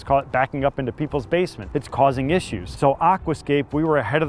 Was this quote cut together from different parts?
yes; 1 cut; at 2.7 s

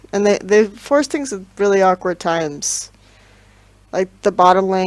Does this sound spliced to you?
no; 0 cuts

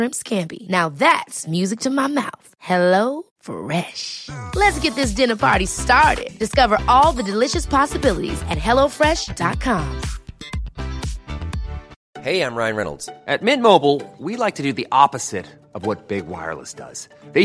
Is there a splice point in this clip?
yes; 1 cut; at 12.0 s

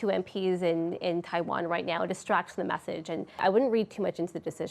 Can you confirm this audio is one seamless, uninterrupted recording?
no; 1 cut; at 3.4 s

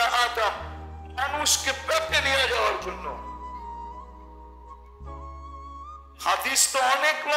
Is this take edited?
no; 0 cuts

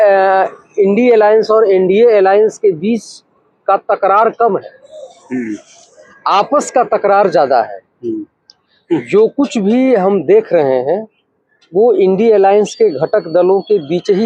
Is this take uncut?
yes; 0 cuts

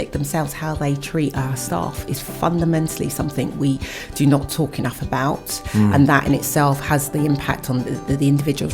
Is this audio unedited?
yes; 0 cuts

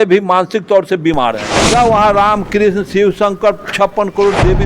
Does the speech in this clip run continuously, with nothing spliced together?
no; 1 cut; at 1.5 s

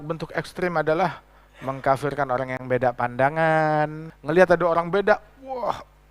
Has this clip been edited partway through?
yes; 1 cut; at 4.1 s

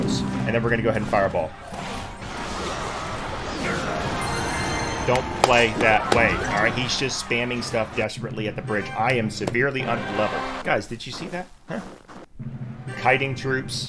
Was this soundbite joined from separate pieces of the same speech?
yes; 2 cuts; at 2.2 s, 10.6 s

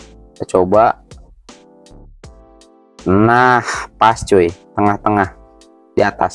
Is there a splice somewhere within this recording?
no; 0 cuts

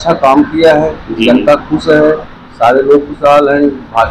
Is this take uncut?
yes; 0 cuts

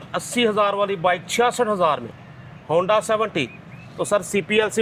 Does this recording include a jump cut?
no; 0 cuts

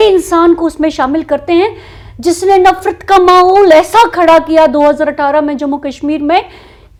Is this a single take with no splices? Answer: yes; 0 cuts

